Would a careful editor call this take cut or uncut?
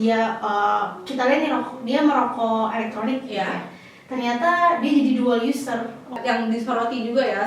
cut